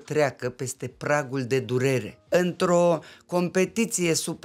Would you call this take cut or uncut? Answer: cut